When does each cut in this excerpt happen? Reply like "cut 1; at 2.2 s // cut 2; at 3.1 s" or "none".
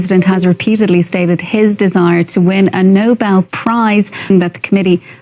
cut 1; at 4.3 s